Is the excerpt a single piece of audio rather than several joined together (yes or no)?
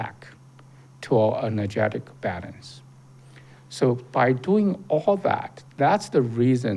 yes